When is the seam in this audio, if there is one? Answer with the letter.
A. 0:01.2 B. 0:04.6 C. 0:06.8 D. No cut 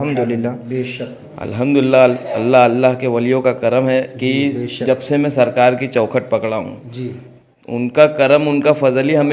A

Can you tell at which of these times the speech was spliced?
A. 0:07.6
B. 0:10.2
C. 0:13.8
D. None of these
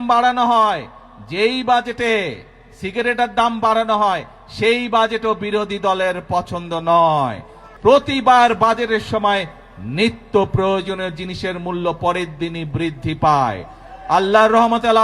A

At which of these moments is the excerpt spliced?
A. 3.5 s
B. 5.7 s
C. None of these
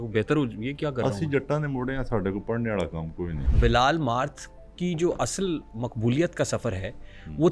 A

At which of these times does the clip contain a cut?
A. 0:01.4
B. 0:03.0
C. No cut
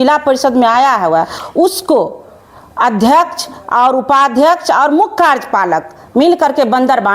A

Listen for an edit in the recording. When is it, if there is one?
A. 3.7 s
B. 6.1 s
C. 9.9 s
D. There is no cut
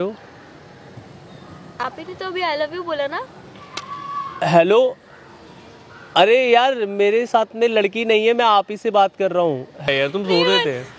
C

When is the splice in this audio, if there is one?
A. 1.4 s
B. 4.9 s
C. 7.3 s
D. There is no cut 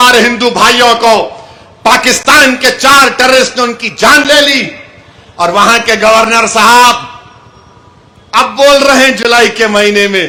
D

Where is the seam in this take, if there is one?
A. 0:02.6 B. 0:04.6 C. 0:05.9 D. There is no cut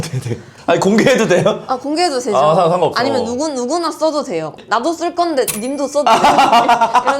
B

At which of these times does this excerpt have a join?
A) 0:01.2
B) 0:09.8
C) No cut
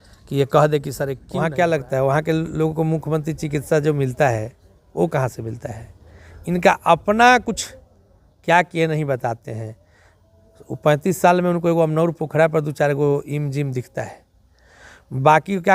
A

